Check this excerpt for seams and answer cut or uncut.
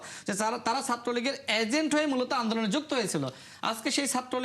uncut